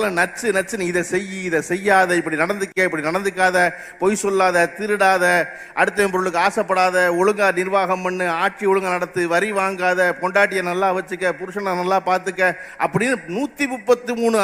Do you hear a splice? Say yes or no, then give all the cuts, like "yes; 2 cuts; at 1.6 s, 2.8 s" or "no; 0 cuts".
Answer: no; 0 cuts